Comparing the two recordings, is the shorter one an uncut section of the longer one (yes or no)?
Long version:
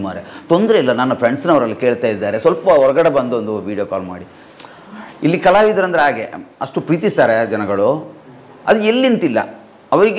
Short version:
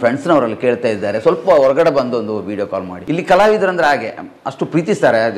no